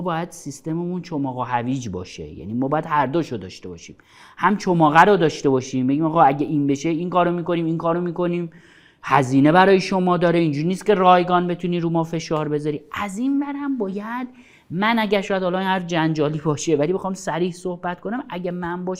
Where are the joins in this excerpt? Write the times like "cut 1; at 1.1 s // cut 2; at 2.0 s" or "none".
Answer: none

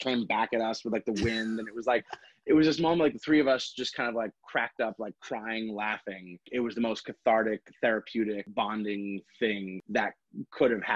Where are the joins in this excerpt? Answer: cut 1; at 6.5 s // cut 2; at 8.5 s // cut 3; at 9.8 s

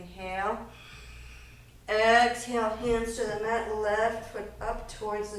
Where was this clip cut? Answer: none

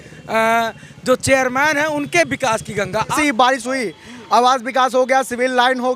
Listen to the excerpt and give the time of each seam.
cut 1; at 3.1 s

